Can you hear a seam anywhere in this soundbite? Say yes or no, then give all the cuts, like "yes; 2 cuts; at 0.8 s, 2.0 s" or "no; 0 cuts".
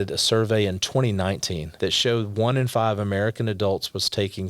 yes; 1 cut; at 1.6 s